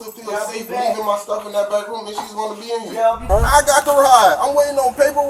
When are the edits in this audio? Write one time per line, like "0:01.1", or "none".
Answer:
0:03.2

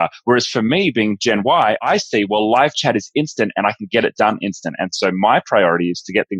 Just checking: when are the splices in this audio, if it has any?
none

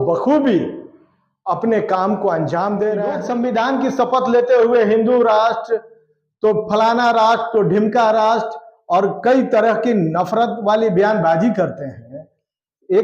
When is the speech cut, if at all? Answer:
0:03.2

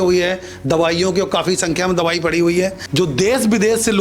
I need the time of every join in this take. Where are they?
0:02.8

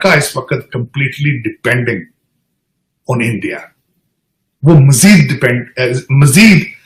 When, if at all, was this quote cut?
none

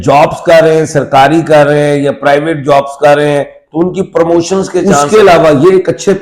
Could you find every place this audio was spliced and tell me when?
0:05.0

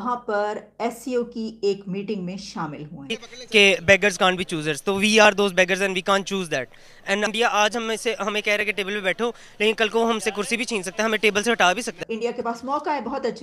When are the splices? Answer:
0:03.2
0:07.3
0:11.9

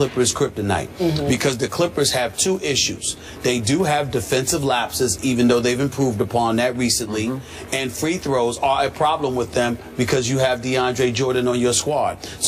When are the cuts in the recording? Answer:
0:02.1

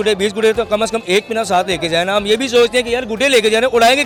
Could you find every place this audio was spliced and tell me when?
none

